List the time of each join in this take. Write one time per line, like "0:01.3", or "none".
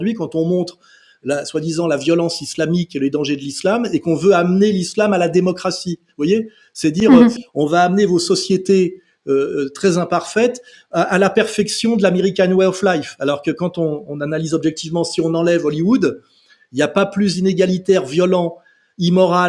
none